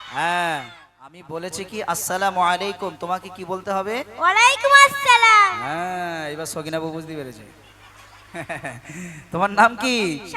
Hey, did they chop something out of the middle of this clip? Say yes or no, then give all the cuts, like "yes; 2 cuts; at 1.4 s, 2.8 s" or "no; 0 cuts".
yes; 1 cut; at 1.3 s